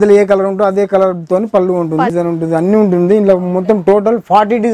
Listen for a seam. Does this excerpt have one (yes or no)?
yes